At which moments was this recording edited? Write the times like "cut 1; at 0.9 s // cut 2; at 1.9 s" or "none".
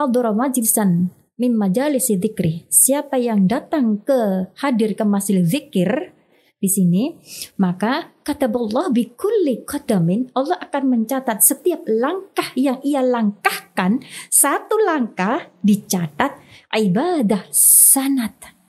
none